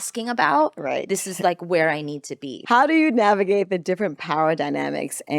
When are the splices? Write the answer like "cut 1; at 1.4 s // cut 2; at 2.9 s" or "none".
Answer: cut 1; at 2.5 s